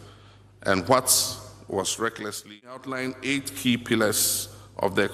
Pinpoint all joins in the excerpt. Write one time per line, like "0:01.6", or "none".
0:02.9